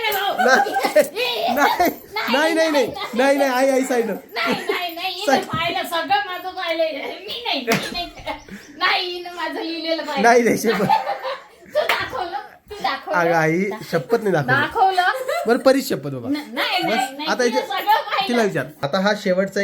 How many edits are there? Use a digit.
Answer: 1